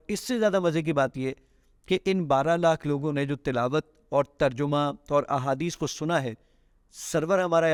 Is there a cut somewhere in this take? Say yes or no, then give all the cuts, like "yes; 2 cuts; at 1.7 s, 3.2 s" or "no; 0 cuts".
no; 0 cuts